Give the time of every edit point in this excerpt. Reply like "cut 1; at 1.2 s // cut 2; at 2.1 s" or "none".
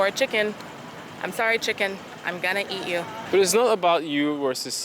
cut 1; at 3.2 s